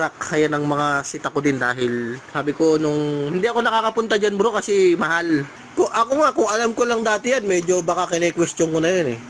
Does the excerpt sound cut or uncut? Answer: cut